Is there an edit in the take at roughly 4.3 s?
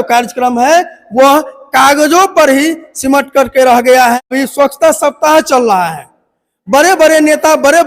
yes; 1 cut; at 4.3 s

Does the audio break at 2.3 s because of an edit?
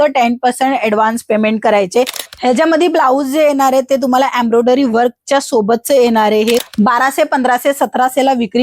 yes; 2 cuts; at 2.3 s, 6.6 s

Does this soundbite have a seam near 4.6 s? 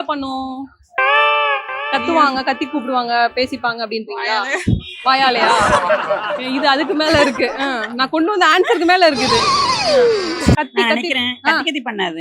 no; 1 cut; at 10.6 s

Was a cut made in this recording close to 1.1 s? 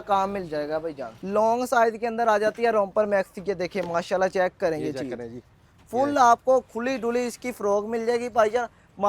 yes; 1 cut; at 1.1 s

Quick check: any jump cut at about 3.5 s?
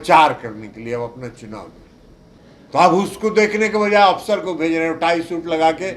no; 1 cut; at 2.2 s

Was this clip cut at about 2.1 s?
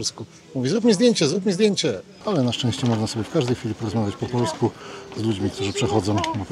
yes; 1 cut; at 2.1 s

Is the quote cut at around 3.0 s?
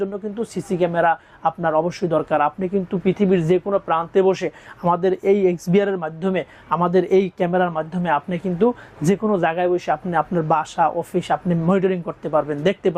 no; 0 cuts

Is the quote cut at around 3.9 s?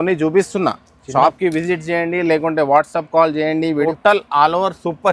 yes; 1 cut; at 3.9 s

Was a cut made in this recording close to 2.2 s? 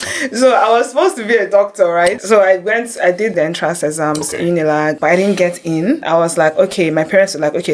yes; 4 cuts; at 2.2 s, 3.3 s, 5.0 s, 6.0 s

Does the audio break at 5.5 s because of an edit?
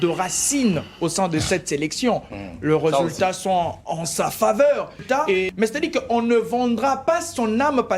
yes; 1 cut; at 5.5 s

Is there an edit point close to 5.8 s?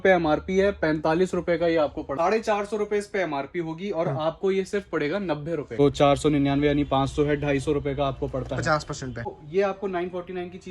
yes; 3 cuts; at 2.1 s, 5.8 s, 9.4 s

